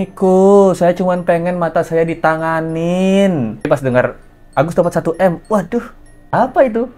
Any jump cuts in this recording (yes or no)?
no